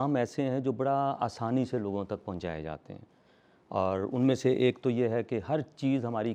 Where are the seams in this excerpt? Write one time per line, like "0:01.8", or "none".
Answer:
none